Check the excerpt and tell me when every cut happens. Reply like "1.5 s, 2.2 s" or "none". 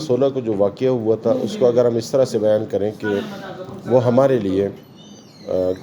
none